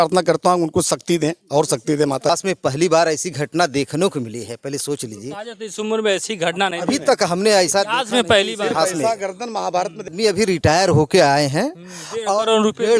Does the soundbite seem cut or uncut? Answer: cut